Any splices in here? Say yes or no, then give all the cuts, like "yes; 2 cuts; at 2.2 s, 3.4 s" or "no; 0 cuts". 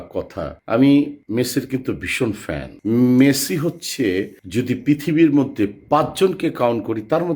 yes; 1 cut; at 2.7 s